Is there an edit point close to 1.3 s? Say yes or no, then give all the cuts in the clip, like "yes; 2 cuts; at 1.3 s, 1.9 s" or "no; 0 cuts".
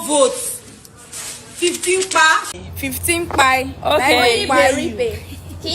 no; 1 cut; at 2.5 s